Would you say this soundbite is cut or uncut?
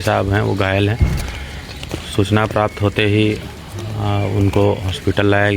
uncut